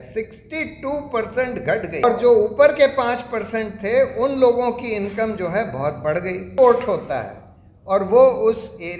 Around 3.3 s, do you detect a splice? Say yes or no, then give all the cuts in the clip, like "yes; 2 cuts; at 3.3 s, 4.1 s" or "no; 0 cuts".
no; 2 cuts; at 2.0 s, 6.5 s